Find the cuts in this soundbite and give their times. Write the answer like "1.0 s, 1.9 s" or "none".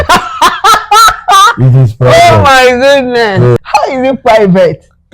3.6 s